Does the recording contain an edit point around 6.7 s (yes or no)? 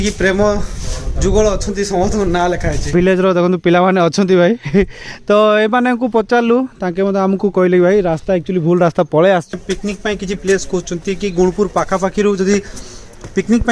no